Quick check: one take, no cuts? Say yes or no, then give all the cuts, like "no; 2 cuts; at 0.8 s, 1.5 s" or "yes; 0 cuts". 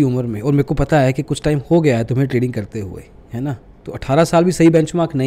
yes; 0 cuts